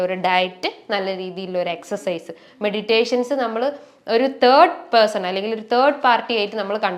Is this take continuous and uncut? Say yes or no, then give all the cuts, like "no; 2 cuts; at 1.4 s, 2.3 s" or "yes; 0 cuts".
yes; 0 cuts